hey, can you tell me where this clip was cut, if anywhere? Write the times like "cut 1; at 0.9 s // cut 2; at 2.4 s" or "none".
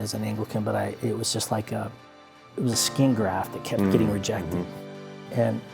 cut 1; at 2.4 s